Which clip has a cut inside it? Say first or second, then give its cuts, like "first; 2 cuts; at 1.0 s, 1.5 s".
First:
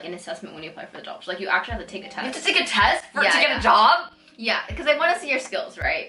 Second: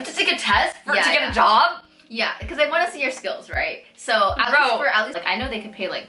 second; 1 cut; at 5.2 s